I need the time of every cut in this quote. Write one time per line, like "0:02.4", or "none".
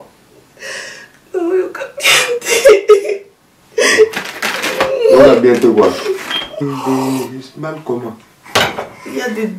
0:06.5